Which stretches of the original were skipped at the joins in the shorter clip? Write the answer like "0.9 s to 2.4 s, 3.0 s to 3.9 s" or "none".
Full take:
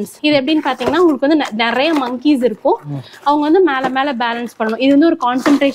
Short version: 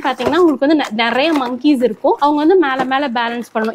2.8 s to 3.2 s